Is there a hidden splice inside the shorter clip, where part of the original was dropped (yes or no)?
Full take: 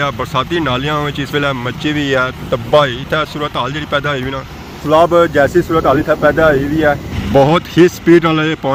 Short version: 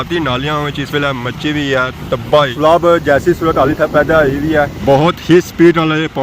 yes